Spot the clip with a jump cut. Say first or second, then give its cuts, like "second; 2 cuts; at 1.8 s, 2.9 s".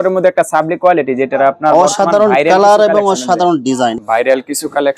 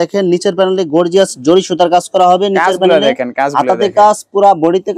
first; 1 cut; at 4.0 s